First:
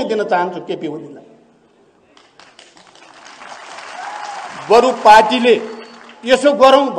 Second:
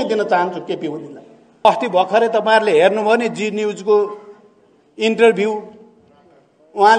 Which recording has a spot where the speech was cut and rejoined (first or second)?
second